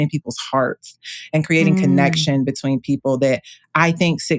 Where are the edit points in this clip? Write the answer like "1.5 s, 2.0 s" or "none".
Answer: none